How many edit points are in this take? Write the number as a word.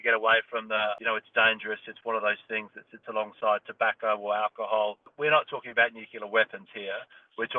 two